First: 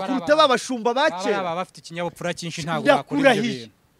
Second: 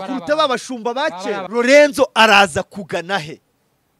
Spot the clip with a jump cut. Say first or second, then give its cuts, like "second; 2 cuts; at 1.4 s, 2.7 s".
second; 1 cut; at 1.4 s